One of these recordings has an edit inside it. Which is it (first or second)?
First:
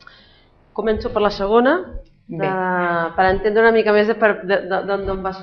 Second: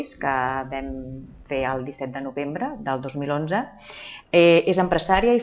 second